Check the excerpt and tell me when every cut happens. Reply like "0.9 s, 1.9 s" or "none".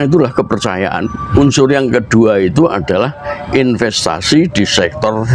1.3 s